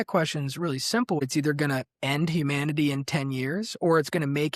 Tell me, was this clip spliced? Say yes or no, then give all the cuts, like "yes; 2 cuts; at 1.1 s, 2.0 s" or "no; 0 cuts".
yes; 1 cut; at 1.2 s